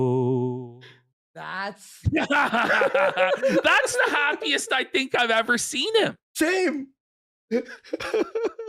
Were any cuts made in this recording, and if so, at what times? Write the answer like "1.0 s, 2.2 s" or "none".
1.5 s